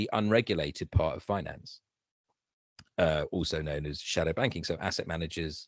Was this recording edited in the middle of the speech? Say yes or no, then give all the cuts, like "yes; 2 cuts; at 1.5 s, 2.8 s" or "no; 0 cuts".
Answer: no; 0 cuts